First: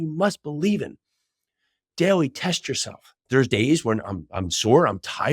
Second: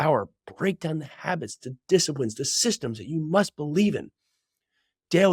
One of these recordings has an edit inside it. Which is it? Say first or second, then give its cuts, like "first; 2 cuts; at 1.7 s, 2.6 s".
first; 1 cut; at 3.2 s